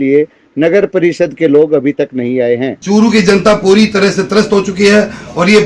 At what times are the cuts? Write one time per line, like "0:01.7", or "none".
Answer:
0:02.7